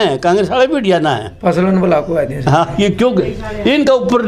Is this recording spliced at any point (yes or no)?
no